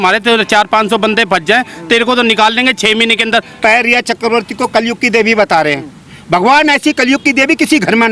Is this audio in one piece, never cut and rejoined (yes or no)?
no